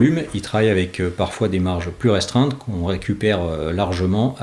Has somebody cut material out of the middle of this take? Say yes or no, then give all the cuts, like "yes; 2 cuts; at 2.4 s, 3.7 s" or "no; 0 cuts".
no; 0 cuts